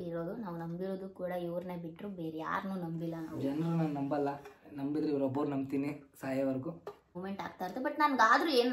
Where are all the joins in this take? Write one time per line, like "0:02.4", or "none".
0:07.2

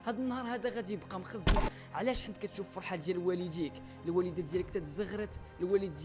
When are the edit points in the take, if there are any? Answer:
0:01.7

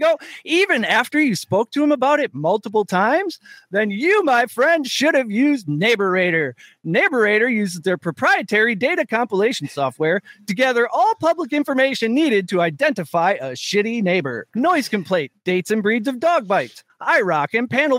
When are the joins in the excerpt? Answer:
0:14.4
0:15.3

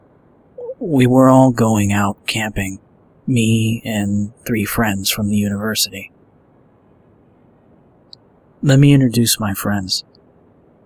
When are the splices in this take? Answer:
0:07.8

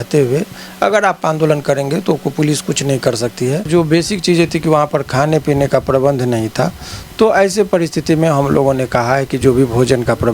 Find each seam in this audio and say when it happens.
0:03.7

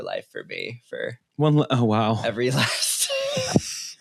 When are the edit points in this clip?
none

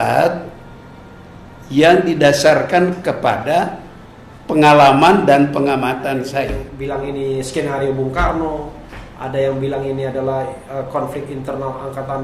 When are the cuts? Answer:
0:06.2

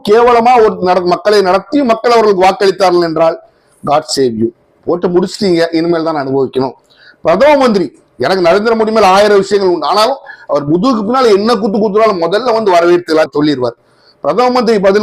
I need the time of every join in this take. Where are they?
none

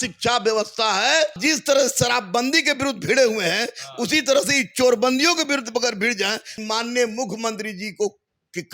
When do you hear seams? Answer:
0:01.4
0:06.5

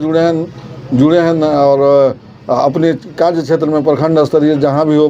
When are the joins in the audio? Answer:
none

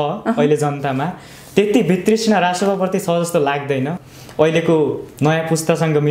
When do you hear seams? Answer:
0:04.0

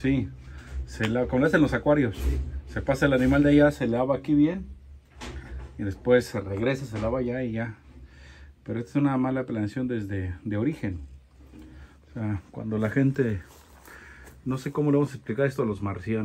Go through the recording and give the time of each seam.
none

